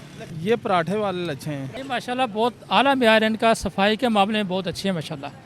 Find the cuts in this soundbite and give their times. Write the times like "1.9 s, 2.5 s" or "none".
1.7 s